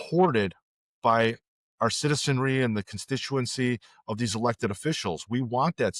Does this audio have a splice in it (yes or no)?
no